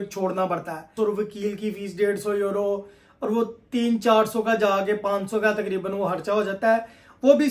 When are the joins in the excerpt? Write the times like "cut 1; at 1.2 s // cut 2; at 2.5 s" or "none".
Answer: cut 1; at 1.3 s